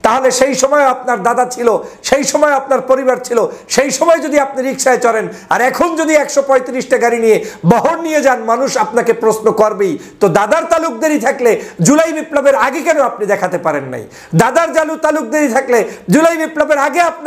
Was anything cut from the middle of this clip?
no; 0 cuts

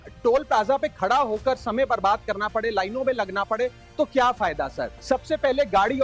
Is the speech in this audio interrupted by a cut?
yes; 1 cut; at 4.9 s

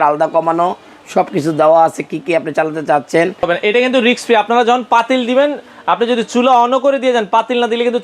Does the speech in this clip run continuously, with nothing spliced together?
no; 1 cut; at 3.5 s

